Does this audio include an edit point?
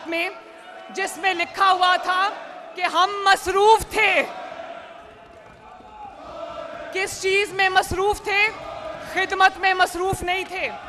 no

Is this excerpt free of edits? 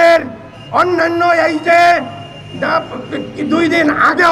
yes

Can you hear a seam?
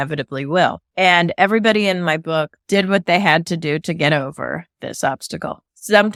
no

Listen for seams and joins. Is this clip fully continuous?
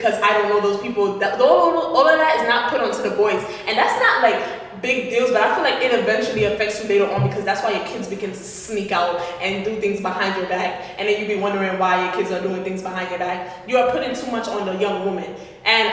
yes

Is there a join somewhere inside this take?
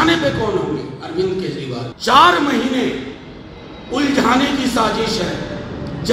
yes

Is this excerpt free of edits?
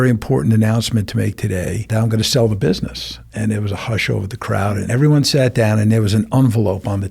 no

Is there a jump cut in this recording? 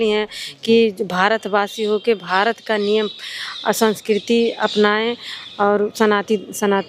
no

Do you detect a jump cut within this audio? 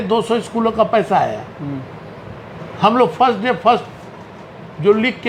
no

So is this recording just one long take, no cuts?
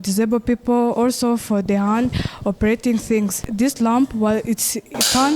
no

